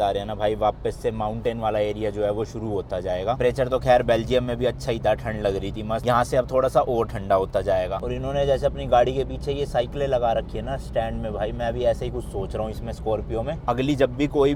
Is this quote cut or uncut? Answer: uncut